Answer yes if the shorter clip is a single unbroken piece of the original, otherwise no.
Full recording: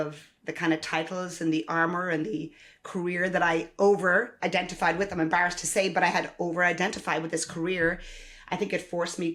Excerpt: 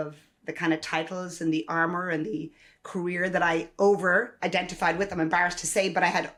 yes